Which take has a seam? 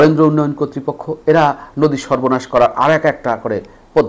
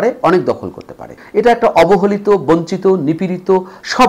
second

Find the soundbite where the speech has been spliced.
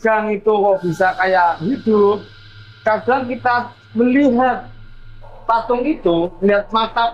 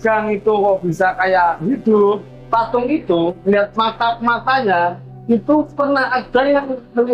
second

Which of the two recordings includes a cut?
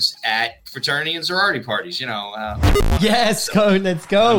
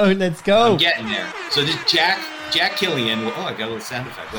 first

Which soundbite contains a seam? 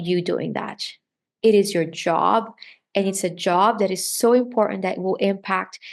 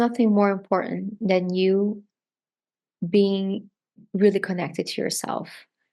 second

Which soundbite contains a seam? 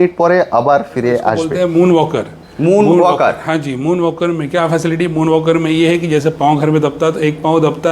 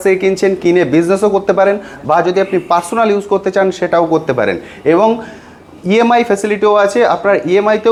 first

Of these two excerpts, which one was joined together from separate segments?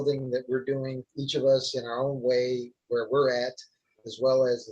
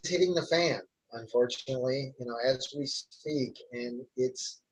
first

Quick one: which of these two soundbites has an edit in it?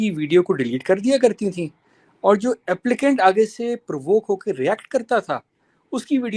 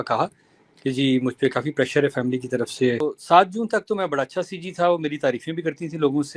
second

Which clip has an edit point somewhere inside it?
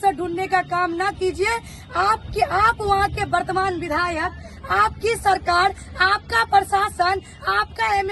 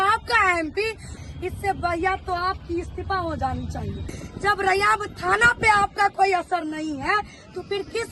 second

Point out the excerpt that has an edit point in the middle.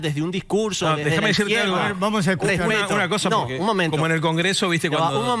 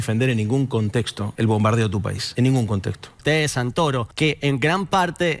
second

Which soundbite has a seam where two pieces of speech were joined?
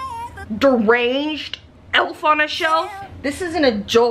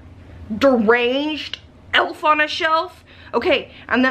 first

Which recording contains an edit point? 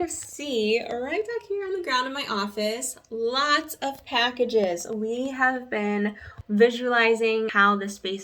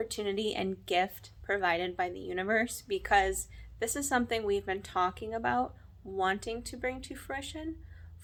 first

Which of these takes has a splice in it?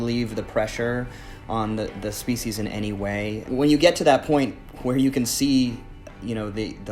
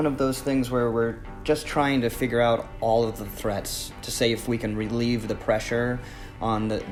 first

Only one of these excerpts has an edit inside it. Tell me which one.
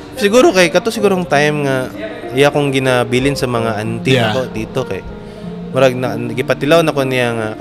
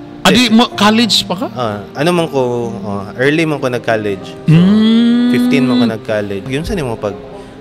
second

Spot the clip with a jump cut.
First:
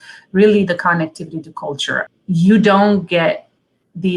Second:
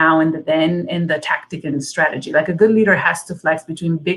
first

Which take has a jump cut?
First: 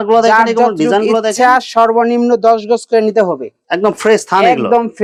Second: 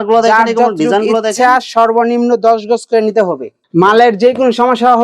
second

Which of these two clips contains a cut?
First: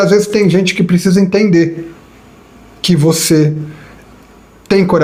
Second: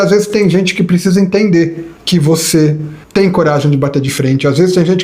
second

